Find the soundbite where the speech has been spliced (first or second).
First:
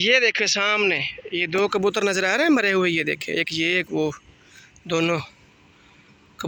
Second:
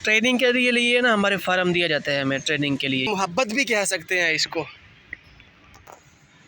second